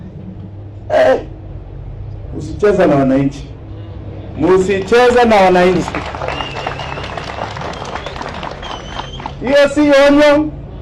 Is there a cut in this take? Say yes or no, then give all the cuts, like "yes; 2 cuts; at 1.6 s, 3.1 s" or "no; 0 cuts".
no; 0 cuts